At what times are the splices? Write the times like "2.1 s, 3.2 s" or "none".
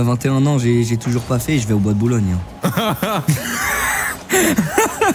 none